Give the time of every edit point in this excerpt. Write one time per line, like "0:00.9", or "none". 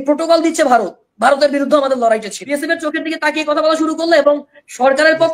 0:02.4